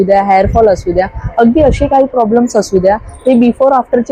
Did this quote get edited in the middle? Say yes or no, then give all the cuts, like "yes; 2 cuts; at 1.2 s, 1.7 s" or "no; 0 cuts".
no; 0 cuts